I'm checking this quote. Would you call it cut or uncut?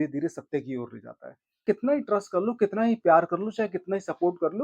cut